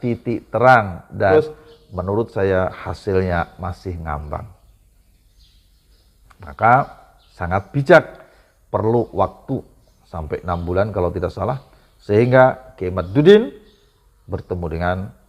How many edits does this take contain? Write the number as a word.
one